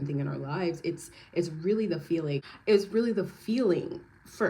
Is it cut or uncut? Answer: cut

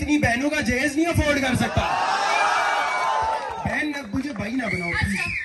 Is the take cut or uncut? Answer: uncut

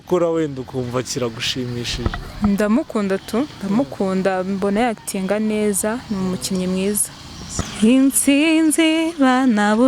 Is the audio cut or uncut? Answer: cut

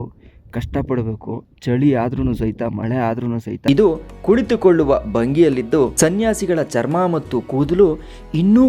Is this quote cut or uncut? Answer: cut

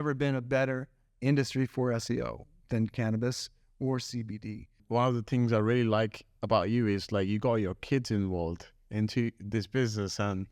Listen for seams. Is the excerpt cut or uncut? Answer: cut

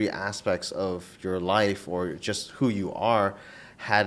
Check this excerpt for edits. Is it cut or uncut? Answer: uncut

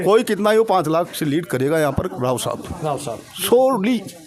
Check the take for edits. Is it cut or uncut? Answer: uncut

